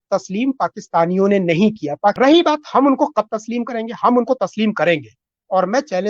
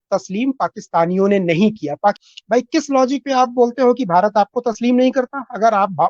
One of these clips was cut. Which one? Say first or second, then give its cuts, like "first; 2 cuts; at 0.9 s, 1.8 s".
first; 1 cut; at 2.2 s